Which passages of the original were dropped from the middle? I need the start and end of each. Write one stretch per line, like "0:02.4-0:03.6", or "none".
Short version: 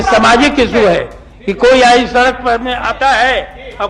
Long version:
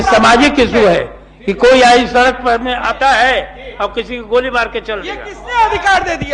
none